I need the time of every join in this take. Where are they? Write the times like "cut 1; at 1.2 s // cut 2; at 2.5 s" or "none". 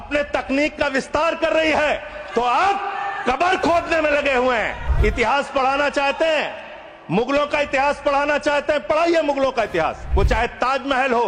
cut 1; at 4.8 s // cut 2; at 10.0 s